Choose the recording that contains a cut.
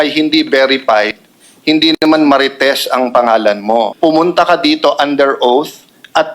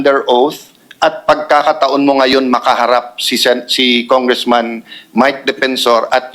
first; 1 cut; at 3.9 s

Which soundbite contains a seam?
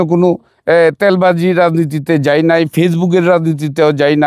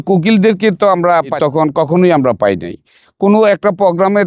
second; 1 cut; at 1.3 s

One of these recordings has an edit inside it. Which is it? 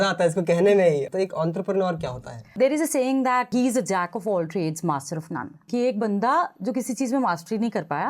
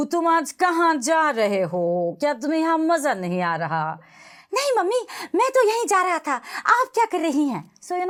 first; 4 cuts; at 1.1 s, 2.5 s, 3.5 s, 5.6 s

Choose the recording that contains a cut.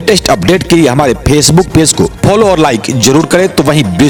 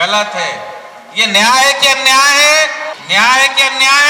second; 1 cut; at 2.9 s

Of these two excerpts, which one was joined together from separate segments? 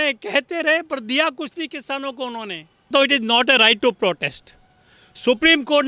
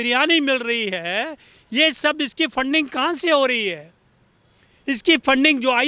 first; 1 cut; at 2.9 s

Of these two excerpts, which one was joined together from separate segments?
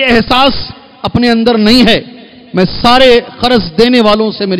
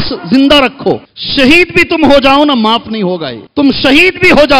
second; 2 cuts; at 1.2 s, 3.3 s

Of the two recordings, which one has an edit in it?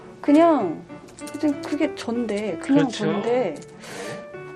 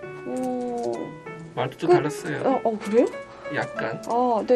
first; 1 cut; at 0.9 s

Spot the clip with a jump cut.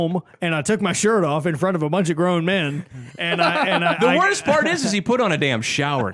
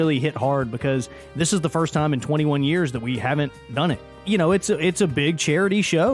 second; 1 cut; at 4.3 s

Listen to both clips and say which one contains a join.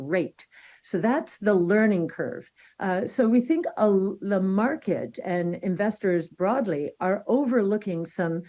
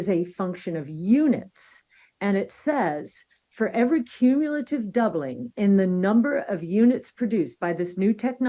first; 1 cut; at 2.5 s

